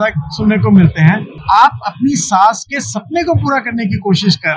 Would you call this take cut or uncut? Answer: cut